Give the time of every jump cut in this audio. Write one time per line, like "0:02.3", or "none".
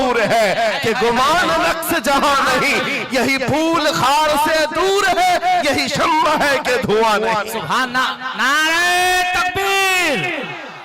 none